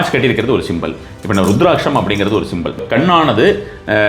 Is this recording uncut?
no; 1 cut; at 2.8 s

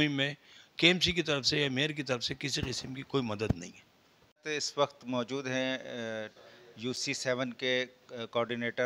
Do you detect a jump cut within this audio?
no; 0 cuts

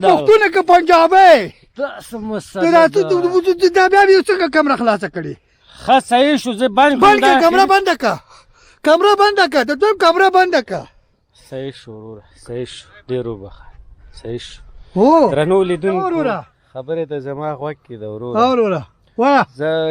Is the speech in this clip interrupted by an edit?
no; 0 cuts

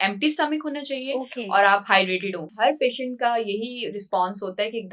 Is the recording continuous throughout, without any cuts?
no; 1 cut; at 2.5 s

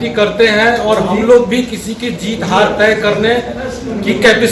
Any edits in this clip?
no; 0 cuts

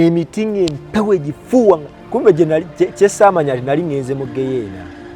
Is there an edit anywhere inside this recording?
yes; 1 cut; at 1.9 s

